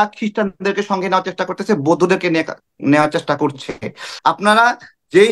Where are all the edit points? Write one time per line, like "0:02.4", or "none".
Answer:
0:04.0